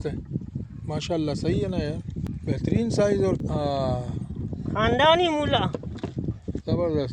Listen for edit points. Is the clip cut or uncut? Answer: cut